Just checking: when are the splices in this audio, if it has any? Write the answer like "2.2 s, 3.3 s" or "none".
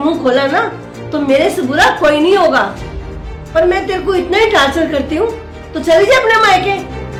none